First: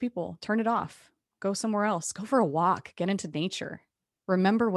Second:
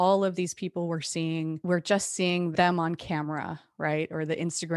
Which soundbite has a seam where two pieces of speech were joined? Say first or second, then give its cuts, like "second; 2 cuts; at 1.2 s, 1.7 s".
second; 2 cuts; at 1.6 s, 2.5 s